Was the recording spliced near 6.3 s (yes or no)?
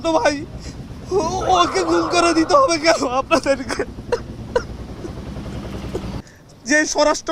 yes